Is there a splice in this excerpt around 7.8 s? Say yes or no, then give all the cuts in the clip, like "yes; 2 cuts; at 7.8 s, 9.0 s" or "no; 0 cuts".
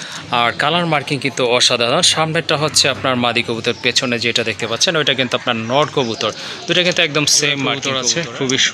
yes; 1 cut; at 7.8 s